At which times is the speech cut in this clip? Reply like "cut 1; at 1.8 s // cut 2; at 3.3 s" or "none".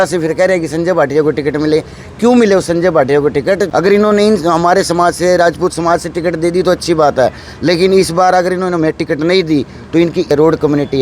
cut 1; at 3.7 s // cut 2; at 10.3 s